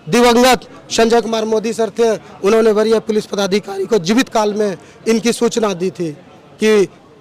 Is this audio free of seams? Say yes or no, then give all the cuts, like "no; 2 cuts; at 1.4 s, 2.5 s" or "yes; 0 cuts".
yes; 0 cuts